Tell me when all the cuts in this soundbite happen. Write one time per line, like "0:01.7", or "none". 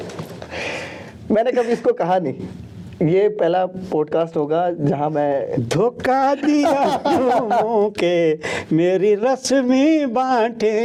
none